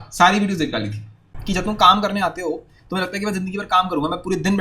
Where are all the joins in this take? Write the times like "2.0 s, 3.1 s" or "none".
1.3 s